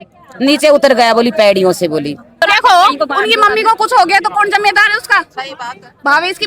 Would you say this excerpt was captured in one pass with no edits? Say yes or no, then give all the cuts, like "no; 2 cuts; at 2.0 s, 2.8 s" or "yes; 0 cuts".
no; 1 cut; at 2.4 s